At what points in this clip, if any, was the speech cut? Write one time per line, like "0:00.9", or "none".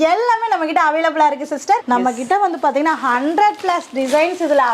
0:01.8